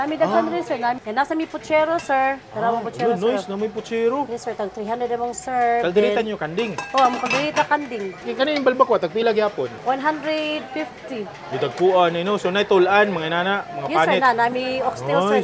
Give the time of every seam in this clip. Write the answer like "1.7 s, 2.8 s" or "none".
1.0 s, 2.5 s, 8.2 s, 9.8 s

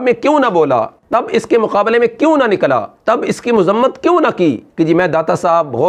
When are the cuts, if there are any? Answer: 1.0 s, 4.7 s

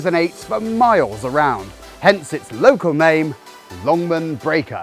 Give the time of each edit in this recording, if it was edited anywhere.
none

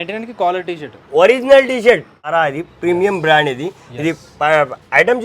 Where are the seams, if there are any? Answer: 2.3 s

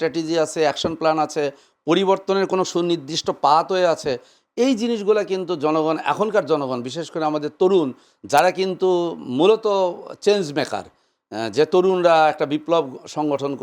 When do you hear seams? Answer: none

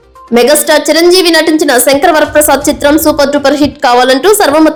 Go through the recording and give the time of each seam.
none

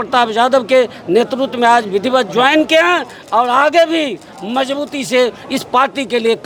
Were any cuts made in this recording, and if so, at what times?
none

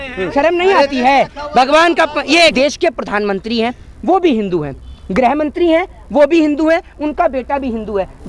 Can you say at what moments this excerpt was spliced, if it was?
2.5 s

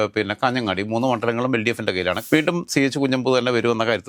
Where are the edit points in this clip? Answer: 2.2 s

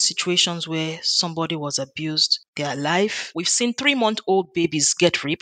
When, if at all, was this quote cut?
3.2 s

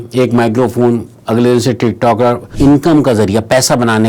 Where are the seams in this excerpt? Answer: 2.5 s

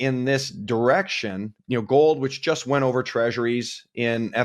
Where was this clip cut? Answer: 1.6 s

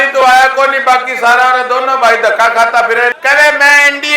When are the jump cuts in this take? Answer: 3.1 s

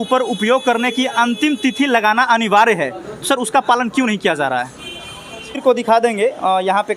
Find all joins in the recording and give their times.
5.6 s

